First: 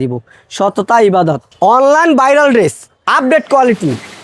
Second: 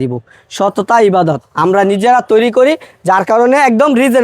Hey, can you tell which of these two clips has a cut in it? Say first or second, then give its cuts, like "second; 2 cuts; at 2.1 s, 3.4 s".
first; 1 cut; at 1.5 s